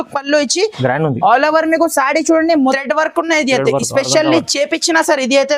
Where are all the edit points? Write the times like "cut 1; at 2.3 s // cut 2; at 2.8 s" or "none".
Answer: cut 1; at 2.8 s